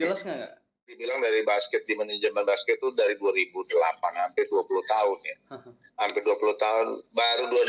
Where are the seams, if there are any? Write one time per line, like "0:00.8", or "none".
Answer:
0:01.0